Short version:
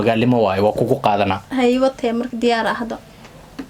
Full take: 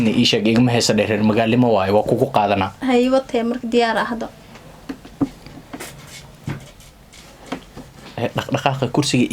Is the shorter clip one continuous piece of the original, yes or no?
yes